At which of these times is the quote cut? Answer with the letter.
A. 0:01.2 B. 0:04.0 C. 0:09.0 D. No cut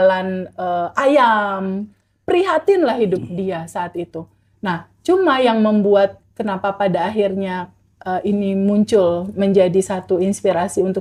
D